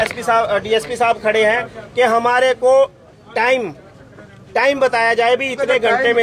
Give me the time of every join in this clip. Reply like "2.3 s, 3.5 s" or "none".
none

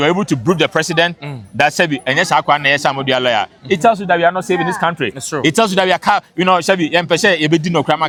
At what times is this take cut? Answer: none

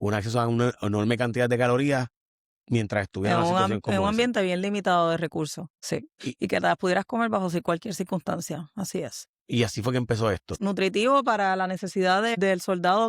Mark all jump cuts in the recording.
10.5 s, 12.3 s

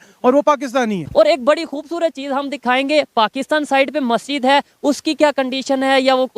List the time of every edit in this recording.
1.0 s

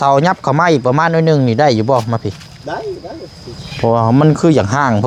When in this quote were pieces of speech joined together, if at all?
none

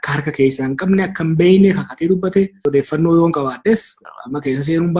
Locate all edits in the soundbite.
2.6 s

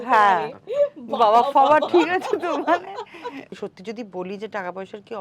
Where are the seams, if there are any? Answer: 3.5 s

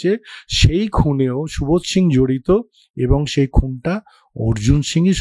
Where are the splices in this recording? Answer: none

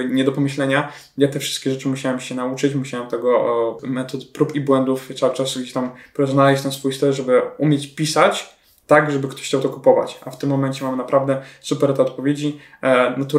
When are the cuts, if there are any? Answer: none

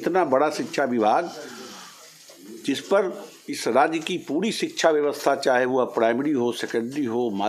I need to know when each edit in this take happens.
none

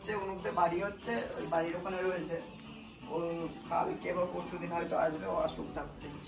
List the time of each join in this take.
none

